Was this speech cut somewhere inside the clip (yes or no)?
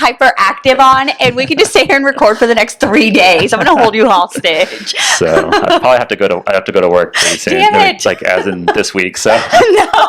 no